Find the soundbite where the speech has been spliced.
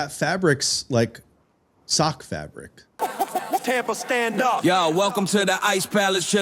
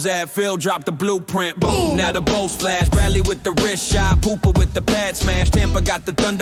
first; 1 cut; at 3.0 s

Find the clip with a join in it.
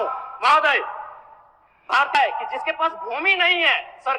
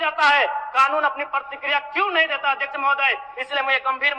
first; 1 cut; at 2.1 s

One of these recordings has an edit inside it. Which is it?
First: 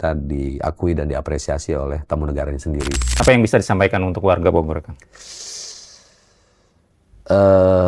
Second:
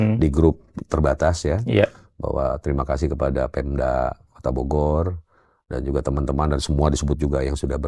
first; 1 cut; at 3.0 s

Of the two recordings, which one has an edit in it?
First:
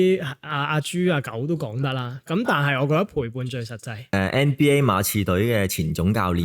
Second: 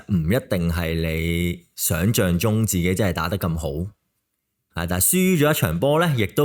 first; 1 cut; at 4.1 s

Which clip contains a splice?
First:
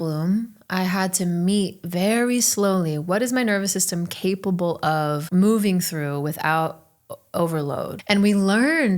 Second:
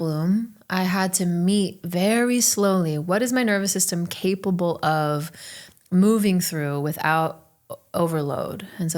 first; 2 cuts; at 5.2 s, 8.0 s

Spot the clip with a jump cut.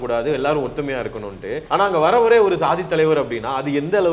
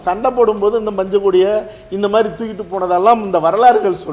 first; 1 cut; at 1.6 s

